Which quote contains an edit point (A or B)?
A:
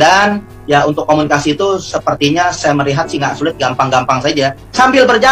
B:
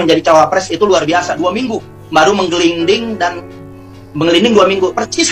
B